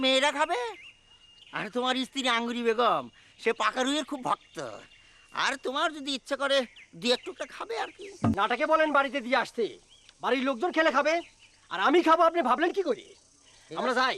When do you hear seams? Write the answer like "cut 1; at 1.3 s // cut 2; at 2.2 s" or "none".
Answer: cut 1; at 8.3 s